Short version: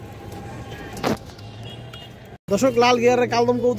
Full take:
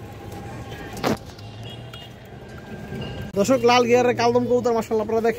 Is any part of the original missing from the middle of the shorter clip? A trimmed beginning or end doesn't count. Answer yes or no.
yes